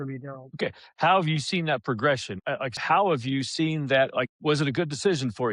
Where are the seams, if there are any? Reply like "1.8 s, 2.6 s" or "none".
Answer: 2.7 s